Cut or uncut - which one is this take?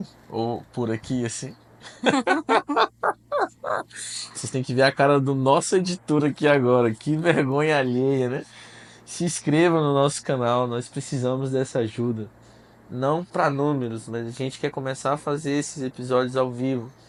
uncut